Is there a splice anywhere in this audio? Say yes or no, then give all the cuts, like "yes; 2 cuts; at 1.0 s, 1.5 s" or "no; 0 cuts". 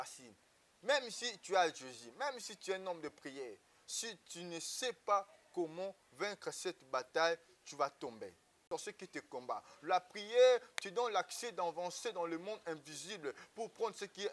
yes; 1 cut; at 8.6 s